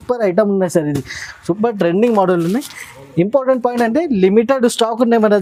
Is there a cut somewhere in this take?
no; 0 cuts

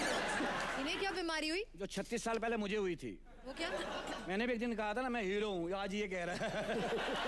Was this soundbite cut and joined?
yes; 1 cut; at 4.2 s

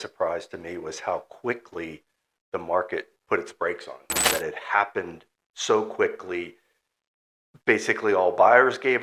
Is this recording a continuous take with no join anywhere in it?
no; 1 cut; at 4.2 s

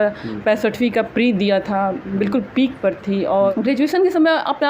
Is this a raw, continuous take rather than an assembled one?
no; 1 cut; at 3.5 s

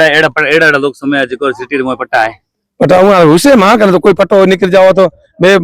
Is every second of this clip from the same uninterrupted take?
yes; 0 cuts

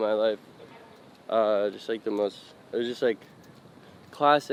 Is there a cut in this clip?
no; 0 cuts

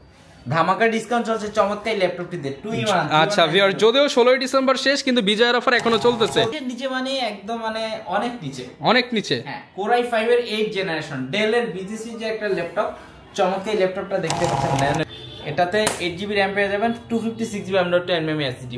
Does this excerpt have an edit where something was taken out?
yes; 2 cuts; at 6.6 s, 15.0 s

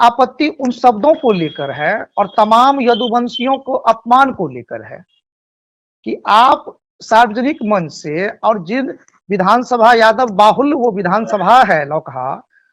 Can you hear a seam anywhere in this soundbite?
no; 0 cuts

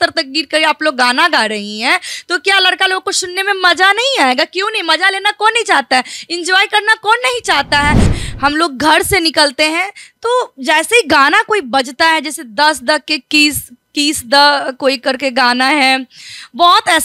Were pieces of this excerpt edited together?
yes; 1 cut; at 8.1 s

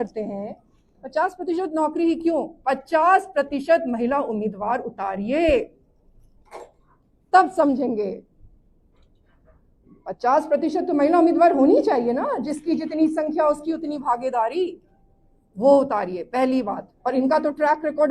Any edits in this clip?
no; 0 cuts

